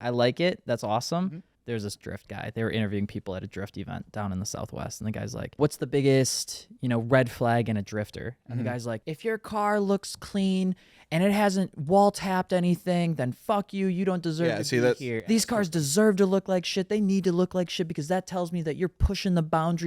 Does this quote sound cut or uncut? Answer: cut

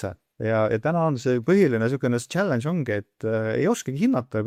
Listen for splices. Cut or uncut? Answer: uncut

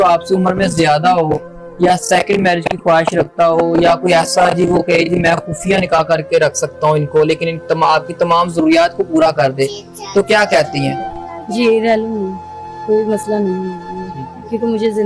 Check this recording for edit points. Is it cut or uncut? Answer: uncut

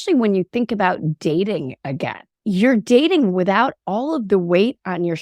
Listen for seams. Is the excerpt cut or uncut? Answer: cut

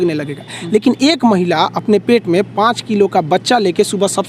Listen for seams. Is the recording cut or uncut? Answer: uncut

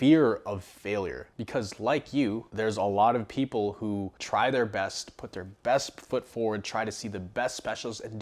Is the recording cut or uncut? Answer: uncut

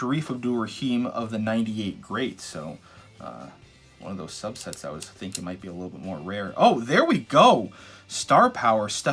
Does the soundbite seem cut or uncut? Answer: uncut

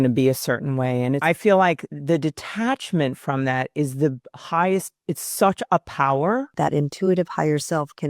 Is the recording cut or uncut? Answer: cut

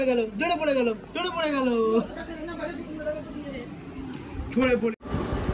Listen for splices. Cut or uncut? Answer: uncut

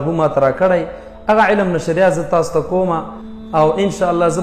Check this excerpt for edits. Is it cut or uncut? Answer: uncut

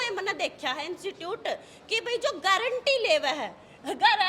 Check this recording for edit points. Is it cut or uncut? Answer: uncut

